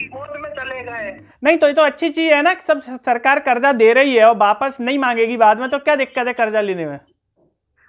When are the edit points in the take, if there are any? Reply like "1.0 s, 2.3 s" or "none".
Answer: 1.2 s